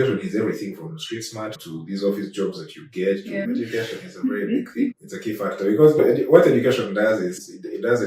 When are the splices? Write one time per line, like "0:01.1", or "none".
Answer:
0:03.4